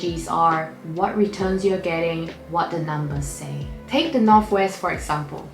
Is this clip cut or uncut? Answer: cut